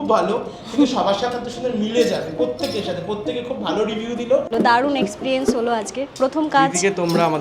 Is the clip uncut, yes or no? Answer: no